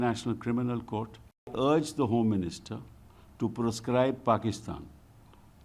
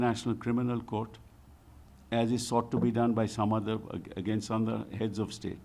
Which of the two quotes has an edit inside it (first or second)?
first